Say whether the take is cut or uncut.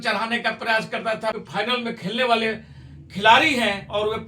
cut